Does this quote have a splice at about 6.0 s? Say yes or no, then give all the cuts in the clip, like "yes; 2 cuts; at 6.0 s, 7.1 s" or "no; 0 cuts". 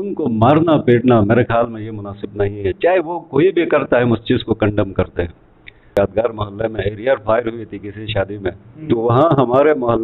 yes; 1 cut; at 6.0 s